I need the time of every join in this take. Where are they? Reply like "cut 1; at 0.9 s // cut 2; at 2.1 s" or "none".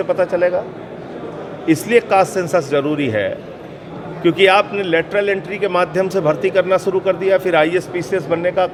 none